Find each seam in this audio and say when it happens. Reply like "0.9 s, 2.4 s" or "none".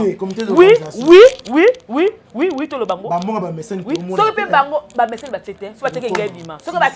none